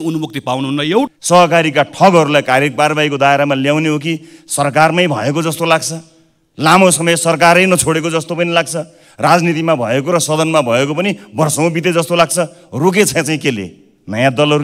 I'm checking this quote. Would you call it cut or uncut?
cut